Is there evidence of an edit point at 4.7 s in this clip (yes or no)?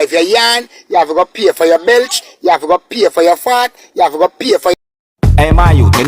yes